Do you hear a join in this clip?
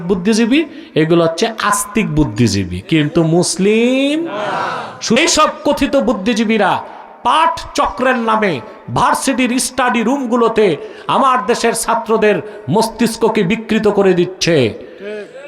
yes; 1 cut; at 5.2 s

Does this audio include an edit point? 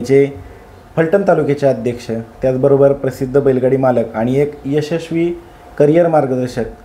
no; 0 cuts

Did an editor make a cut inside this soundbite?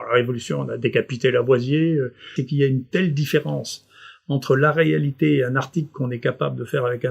yes; 1 cut; at 2.4 s

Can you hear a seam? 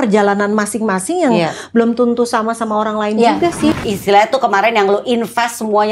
yes; 1 cut; at 3.8 s

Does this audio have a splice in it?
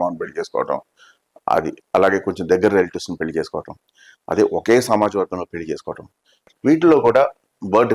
yes; 1 cut; at 6.4 s

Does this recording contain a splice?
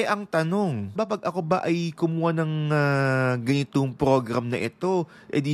yes; 1 cut; at 0.9 s

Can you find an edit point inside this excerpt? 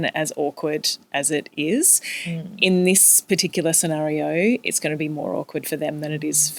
no; 0 cuts

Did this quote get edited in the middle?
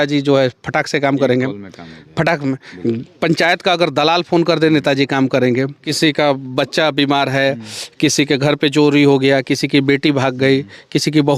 yes; 1 cut; at 5.8 s

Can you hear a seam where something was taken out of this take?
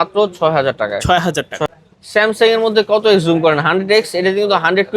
yes; 1 cut; at 1.6 s

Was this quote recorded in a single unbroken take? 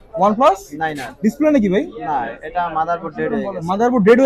yes; 0 cuts

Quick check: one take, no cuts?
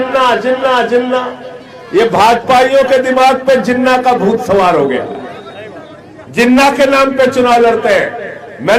yes; 0 cuts

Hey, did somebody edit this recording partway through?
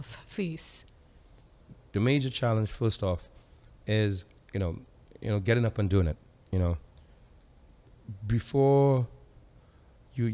yes; 1 cut; at 1.7 s

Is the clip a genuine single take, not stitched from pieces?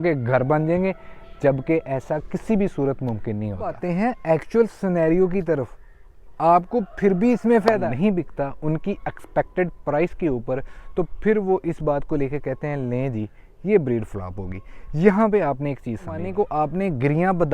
no; 3 cuts; at 3.8 s, 7.9 s, 16.2 s

